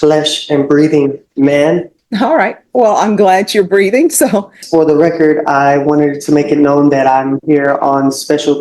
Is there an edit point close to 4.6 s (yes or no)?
yes